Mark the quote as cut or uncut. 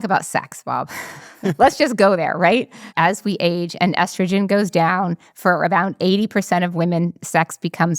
cut